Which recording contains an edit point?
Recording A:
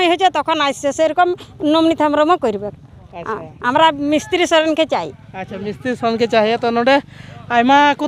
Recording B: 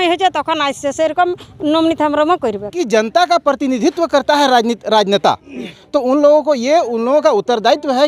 B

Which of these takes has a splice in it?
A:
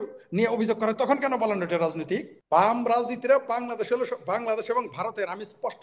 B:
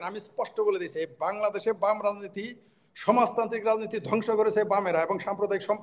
A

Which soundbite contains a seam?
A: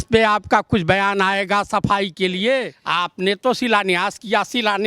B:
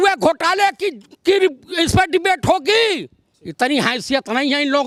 A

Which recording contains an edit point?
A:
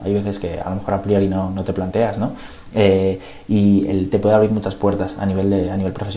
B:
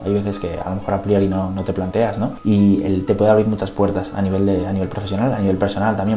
B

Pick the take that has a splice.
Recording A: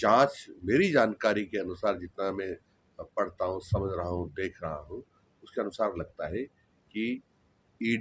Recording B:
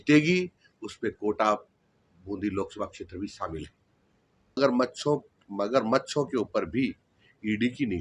B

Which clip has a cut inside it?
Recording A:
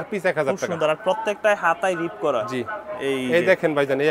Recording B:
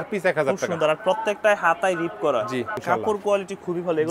B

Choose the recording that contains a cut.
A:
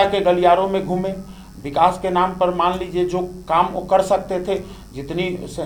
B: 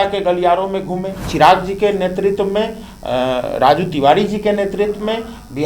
B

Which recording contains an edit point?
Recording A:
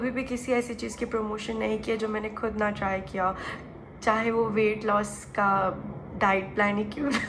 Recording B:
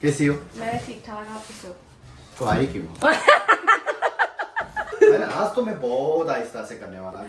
B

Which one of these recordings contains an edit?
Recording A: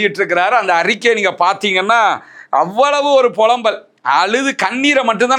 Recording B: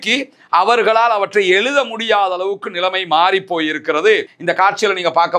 B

